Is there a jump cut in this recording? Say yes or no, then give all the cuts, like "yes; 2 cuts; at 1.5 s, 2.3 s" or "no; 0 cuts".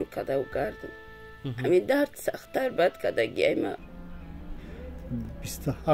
yes; 1 cut; at 3.8 s